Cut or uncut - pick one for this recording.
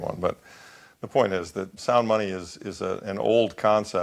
cut